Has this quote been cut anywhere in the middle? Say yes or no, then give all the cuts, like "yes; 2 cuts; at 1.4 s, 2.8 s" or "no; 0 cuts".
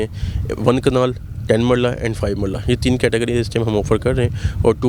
no; 0 cuts